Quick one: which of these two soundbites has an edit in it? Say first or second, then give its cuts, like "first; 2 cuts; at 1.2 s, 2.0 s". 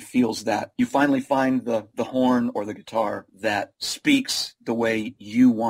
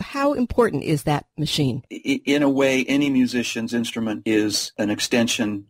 second; 2 cuts; at 1.3 s, 4.7 s